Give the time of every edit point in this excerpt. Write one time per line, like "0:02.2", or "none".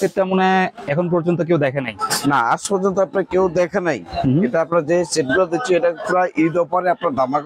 none

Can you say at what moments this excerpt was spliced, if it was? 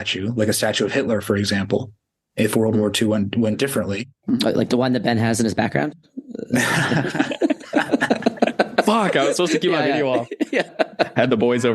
0:10.7

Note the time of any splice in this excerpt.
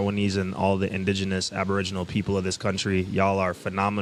none

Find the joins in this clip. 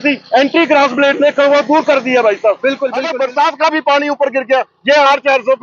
0:03.1

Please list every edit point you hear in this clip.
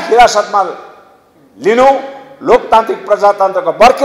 none

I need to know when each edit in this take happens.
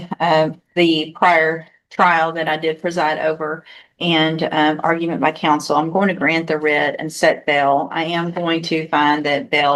none

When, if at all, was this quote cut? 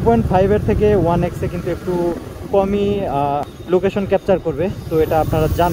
0:03.5

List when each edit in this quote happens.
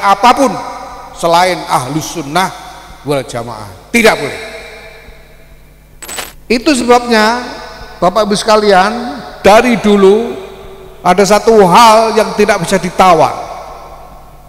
0:06.2

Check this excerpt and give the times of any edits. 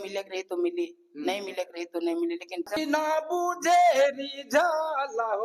0:02.8

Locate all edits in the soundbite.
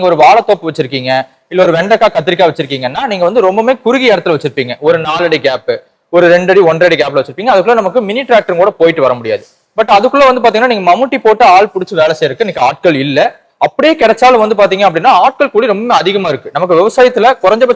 none

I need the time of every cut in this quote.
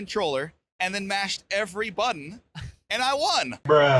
none

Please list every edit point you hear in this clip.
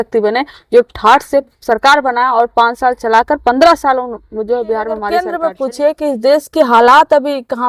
0:05.1

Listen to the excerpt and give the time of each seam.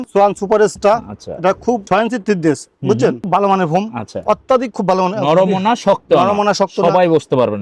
none

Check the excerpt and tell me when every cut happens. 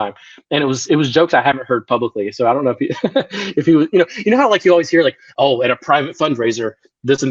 none

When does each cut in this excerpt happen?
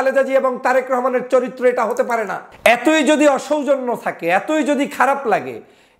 0:02.4

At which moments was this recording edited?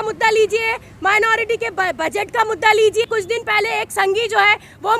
0:03.1

